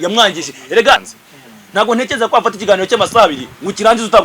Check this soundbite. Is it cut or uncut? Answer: cut